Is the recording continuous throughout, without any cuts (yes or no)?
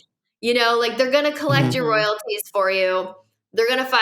yes